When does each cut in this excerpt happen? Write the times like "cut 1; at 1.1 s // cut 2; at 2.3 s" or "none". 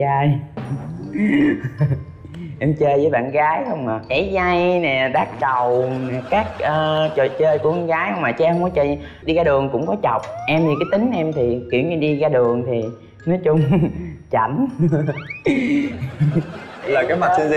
cut 1; at 9.1 s

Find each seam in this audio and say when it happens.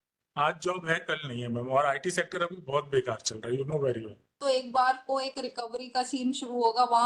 cut 1; at 4.4 s

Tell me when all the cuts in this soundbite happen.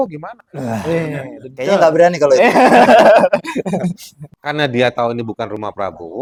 none

